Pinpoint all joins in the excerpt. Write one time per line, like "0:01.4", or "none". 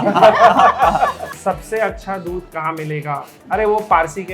0:01.3
0:03.3